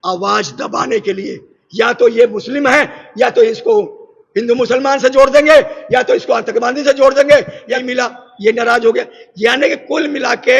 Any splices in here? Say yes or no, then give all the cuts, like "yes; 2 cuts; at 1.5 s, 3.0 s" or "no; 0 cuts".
yes; 1 cut; at 7.8 s